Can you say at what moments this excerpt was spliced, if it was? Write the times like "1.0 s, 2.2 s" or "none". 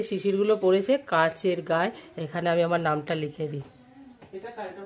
none